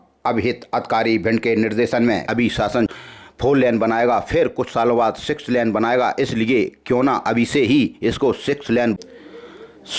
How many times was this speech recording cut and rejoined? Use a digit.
2